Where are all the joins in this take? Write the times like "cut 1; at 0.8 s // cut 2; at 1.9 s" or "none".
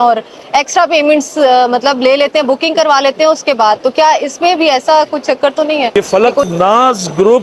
cut 1; at 5.9 s